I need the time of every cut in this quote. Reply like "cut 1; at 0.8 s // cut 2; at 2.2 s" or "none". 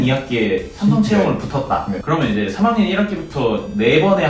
none